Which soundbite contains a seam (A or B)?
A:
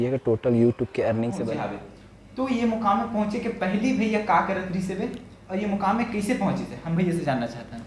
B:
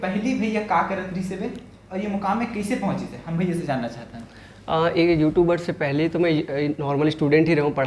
A